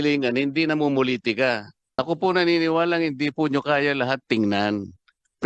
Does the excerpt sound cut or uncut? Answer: cut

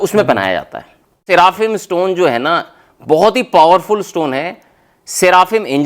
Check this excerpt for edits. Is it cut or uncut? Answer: cut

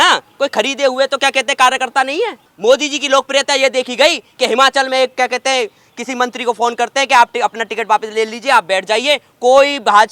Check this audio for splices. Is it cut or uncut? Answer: cut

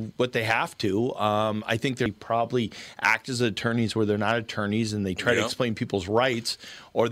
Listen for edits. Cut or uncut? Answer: cut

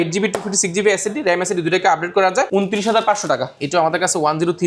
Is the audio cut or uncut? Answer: cut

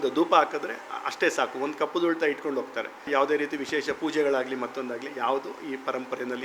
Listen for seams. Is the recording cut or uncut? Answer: cut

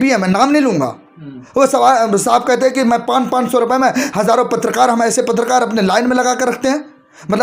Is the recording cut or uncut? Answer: uncut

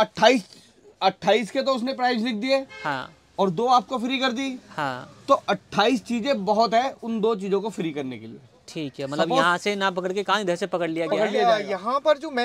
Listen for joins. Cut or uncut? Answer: cut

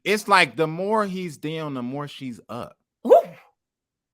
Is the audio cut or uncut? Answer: cut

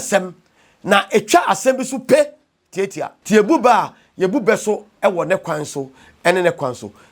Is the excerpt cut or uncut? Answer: cut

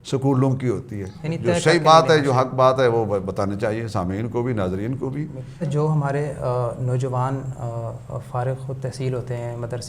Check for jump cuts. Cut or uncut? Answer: cut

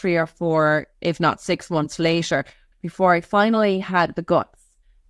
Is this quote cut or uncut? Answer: cut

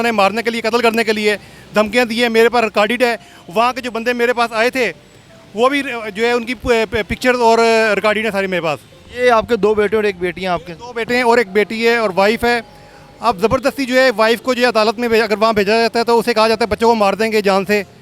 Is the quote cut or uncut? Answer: uncut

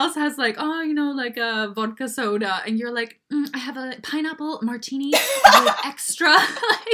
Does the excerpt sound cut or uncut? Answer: uncut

